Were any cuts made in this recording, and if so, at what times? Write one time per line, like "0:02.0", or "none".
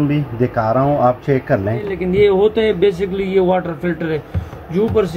0:02.0